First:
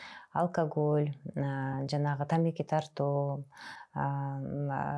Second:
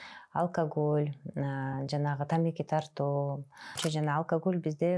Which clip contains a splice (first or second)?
second